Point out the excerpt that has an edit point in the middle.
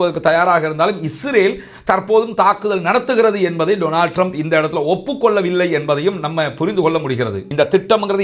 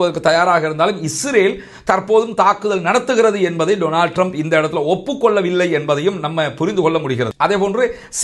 first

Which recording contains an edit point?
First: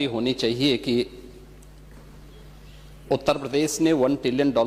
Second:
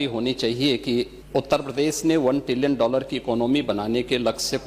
second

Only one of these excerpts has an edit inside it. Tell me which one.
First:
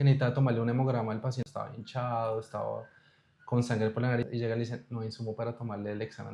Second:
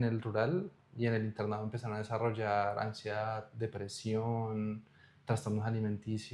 first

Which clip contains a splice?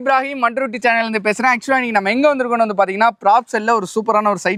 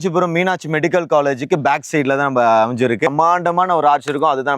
second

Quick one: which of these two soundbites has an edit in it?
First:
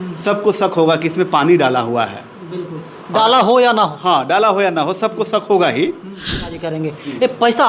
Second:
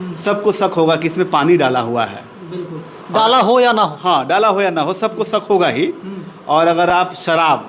first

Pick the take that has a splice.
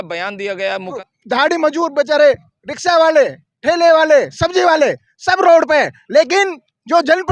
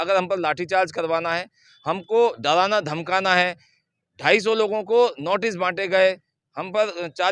first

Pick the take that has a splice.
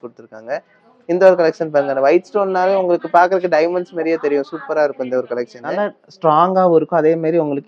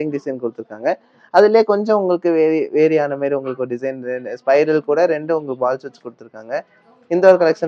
first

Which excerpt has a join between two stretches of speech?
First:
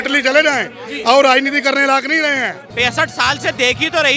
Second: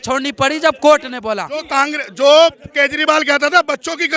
first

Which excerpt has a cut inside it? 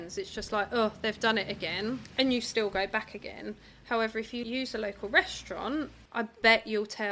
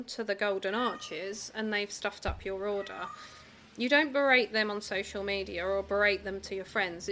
first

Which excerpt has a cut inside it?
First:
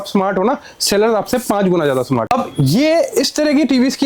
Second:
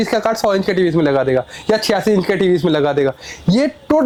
first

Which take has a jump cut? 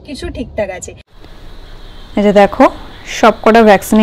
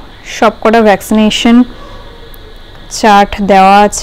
first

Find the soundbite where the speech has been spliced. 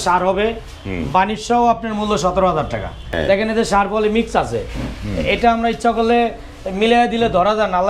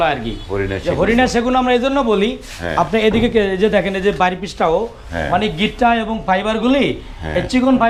first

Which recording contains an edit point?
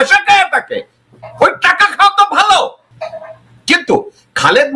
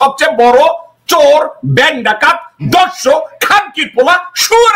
first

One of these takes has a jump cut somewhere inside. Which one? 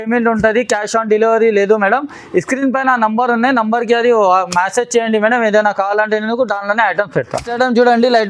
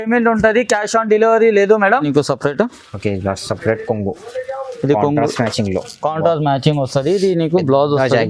second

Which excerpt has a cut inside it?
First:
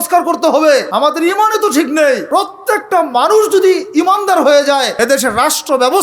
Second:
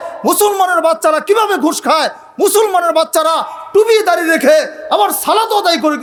first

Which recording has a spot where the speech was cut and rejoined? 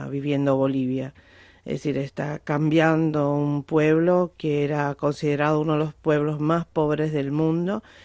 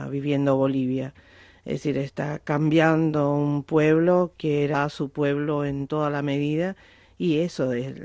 first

